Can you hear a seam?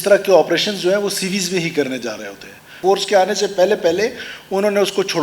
yes; 1 cut; at 2.7 s

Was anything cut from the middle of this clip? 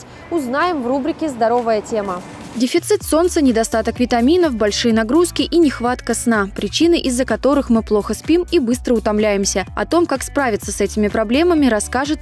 no; 0 cuts

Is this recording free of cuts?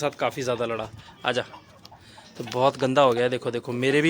yes; 0 cuts

